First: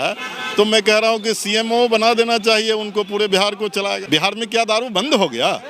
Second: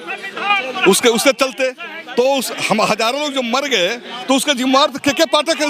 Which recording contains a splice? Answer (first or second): first